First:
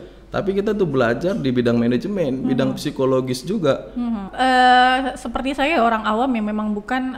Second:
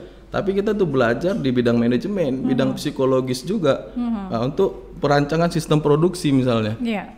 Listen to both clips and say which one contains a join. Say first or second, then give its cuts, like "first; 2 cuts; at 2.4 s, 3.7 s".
first; 1 cut; at 4.3 s